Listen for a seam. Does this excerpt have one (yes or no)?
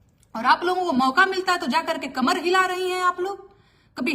no